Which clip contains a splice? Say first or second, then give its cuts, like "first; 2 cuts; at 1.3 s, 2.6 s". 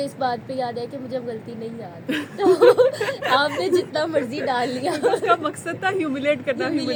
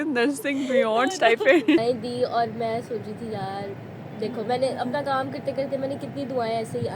second; 1 cut; at 1.8 s